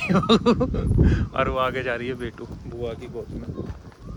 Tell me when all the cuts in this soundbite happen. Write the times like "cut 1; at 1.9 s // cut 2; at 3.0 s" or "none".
none